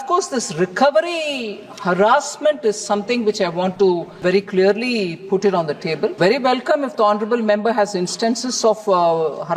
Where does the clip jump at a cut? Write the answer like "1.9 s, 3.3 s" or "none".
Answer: 4.1 s, 6.1 s